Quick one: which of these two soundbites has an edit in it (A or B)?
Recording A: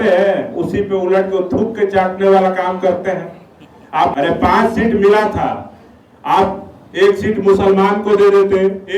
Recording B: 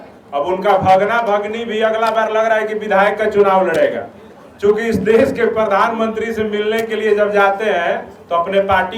A